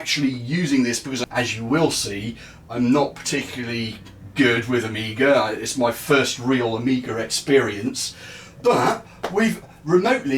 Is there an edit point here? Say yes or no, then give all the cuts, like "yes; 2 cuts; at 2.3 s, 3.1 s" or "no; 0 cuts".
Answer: yes; 1 cut; at 1.2 s